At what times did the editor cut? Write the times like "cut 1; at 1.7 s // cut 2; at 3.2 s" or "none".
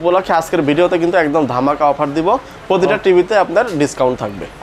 none